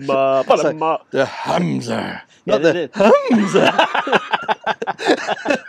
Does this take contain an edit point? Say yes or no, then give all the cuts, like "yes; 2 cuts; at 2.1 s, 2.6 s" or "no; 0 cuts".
no; 0 cuts